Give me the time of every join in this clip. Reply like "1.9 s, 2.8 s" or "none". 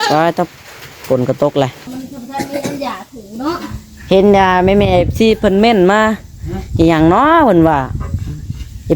1.8 s